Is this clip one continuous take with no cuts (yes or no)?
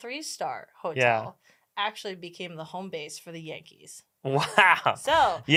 yes